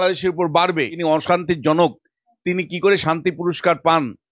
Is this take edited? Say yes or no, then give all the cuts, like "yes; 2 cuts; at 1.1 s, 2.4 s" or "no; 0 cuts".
yes; 1 cut; at 1.0 s